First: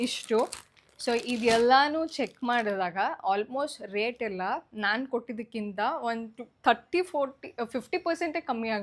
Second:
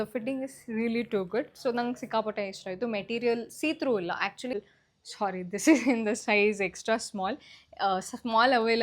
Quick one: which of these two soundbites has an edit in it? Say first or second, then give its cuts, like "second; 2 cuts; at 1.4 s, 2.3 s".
second; 1 cut; at 4.5 s